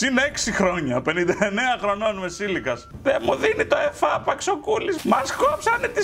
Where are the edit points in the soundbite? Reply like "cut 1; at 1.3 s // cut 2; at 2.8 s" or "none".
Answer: cut 1; at 2.9 s // cut 2; at 5.0 s